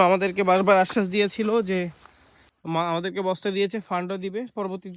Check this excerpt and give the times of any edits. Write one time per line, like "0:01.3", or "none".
none